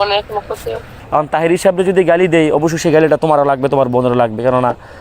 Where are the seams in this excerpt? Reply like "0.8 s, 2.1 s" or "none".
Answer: 0.9 s